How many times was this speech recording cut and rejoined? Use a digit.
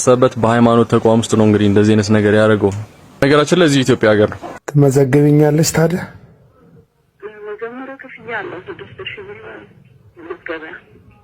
2